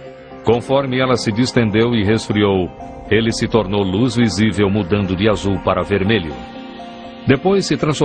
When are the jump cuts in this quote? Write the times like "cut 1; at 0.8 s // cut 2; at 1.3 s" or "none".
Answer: cut 1; at 1.5 s